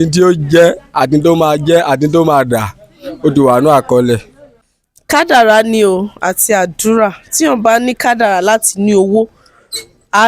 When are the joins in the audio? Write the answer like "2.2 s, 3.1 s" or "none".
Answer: 4.5 s